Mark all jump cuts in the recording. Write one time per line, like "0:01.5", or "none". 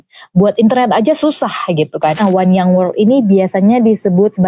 0:02.2